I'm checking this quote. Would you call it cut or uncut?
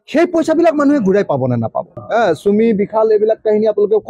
cut